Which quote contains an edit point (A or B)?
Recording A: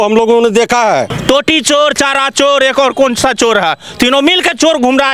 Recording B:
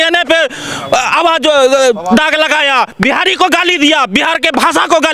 A